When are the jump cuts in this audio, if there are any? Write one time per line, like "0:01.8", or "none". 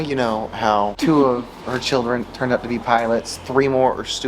0:00.9